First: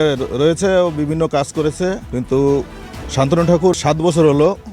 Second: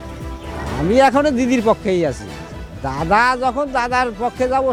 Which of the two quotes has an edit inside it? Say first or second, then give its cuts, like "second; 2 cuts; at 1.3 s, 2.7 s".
first; 2 cuts; at 2.0 s, 3.7 s